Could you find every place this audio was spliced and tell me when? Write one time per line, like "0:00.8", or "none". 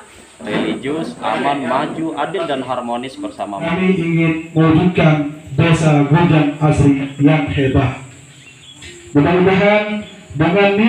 0:03.7

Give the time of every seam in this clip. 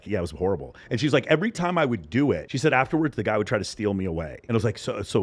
0:02.5

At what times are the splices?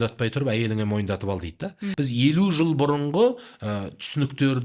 0:01.8

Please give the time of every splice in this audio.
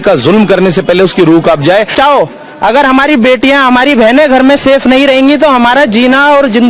0:01.9

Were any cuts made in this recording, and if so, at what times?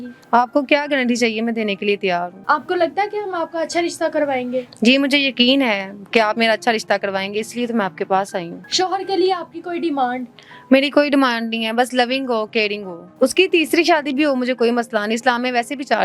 0:02.4
0:08.6
0:13.0

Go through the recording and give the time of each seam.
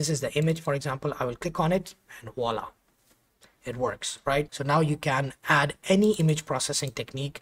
0:04.6

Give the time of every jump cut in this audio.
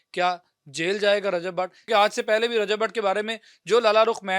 0:01.9

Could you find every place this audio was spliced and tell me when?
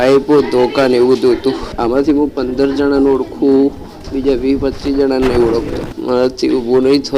0:01.7
0:05.9

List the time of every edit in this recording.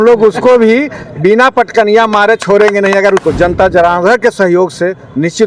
0:03.2

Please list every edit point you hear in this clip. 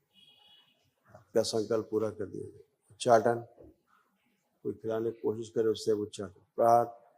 0:01.3

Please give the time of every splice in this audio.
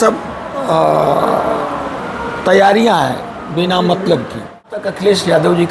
0:04.7

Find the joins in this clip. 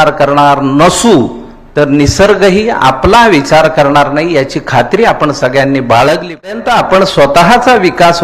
0:06.5

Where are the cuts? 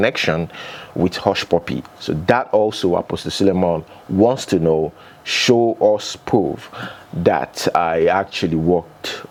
none

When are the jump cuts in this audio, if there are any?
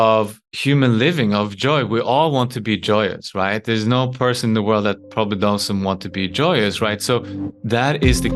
none

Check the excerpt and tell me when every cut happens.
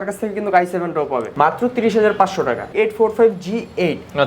0:01.3
0:02.7

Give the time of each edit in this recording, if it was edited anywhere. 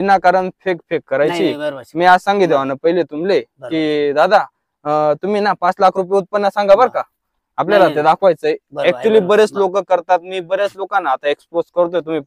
none

